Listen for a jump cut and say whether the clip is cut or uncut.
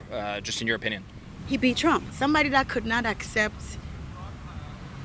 cut